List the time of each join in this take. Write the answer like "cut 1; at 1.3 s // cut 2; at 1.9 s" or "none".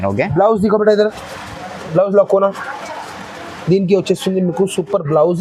none